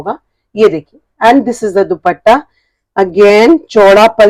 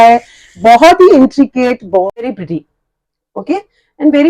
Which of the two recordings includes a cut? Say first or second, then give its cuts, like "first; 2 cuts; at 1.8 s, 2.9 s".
second; 1 cut; at 2.2 s